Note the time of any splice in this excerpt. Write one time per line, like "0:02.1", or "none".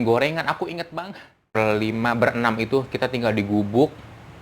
0:01.6